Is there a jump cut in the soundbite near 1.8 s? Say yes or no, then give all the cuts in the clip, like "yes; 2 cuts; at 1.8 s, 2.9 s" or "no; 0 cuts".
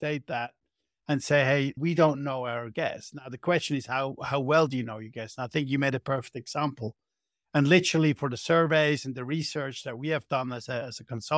yes; 1 cut; at 1.8 s